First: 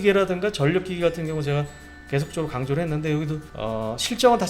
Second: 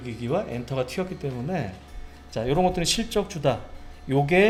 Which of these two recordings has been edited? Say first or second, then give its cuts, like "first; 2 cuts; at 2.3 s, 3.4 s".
first; 1 cut; at 3.5 s